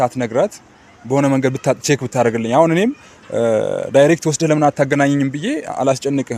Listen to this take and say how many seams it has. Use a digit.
0